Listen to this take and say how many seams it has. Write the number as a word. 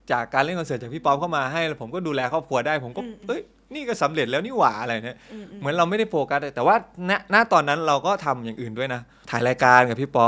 zero